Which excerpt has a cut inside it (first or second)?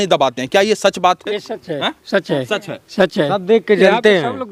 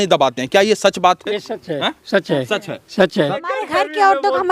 second